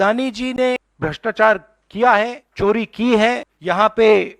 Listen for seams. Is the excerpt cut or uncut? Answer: cut